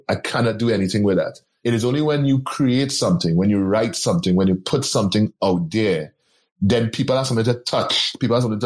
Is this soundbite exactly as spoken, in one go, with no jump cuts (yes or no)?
yes